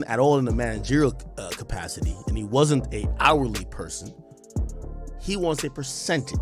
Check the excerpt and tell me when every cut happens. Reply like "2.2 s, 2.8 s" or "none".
none